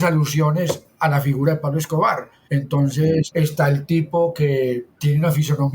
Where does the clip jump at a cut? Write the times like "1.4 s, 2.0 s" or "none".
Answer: 2.3 s, 3.3 s, 4.9 s